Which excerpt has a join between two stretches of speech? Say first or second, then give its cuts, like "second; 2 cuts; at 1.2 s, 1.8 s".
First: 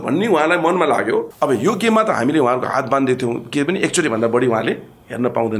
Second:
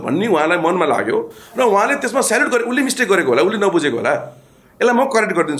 first; 1 cut; at 1.3 s